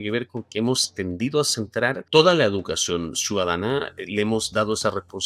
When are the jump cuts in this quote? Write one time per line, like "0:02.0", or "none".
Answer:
0:02.0